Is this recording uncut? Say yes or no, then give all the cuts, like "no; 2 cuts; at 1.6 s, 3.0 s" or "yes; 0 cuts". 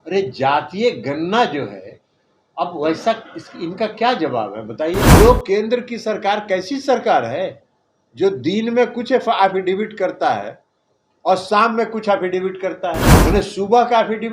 no; 2 cuts; at 5.1 s, 13.1 s